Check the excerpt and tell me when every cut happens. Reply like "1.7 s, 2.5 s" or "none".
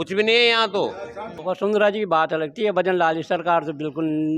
1.4 s